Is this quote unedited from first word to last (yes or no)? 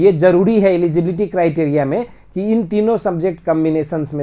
yes